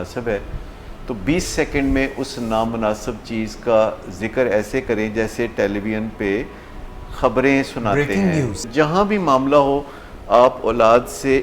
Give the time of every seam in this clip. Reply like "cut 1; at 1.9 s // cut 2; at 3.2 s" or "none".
cut 1; at 8.6 s